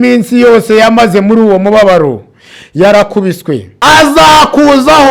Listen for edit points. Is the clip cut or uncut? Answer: cut